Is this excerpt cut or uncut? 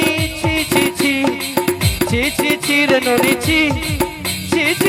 uncut